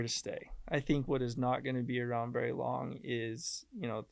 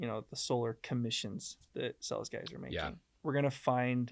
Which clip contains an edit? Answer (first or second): second